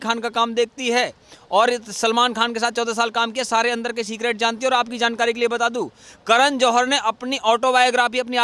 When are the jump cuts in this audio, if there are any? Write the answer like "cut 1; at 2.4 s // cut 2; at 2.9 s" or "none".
none